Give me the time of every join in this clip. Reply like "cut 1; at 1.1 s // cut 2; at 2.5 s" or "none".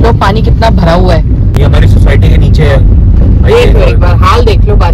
cut 1; at 1.5 s

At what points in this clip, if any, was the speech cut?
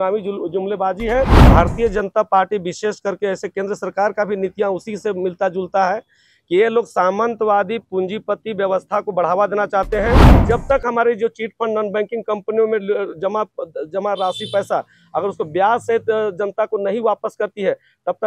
cut 1; at 1.4 s // cut 2; at 10.3 s

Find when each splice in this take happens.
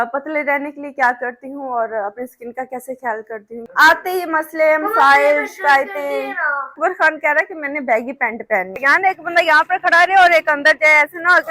cut 1; at 3.6 s // cut 2; at 6.8 s // cut 3; at 8.8 s

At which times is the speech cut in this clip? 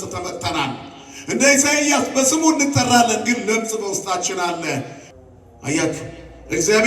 cut 1; at 5.0 s

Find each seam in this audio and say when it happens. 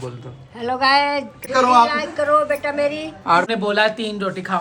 cut 1; at 1.5 s // cut 2; at 3.4 s

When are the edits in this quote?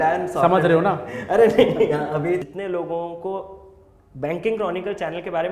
cut 1; at 2.4 s

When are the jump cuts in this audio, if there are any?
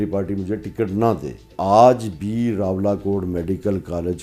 cut 1; at 1.5 s

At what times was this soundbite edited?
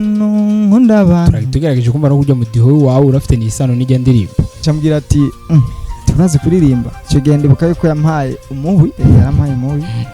cut 1; at 4.6 s // cut 2; at 7.0 s // cut 3; at 8.9 s

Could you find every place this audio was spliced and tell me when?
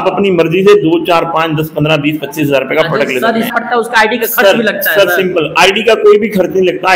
cut 1; at 3.5 s

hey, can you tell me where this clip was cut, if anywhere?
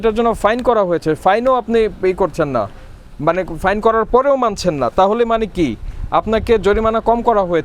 none

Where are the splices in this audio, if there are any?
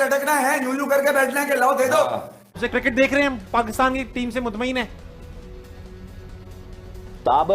cut 1; at 2.5 s

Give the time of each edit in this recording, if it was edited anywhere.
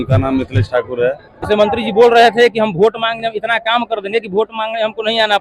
cut 1; at 1.4 s

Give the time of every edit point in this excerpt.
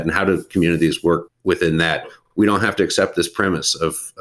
cut 1; at 1.3 s // cut 2; at 2.2 s

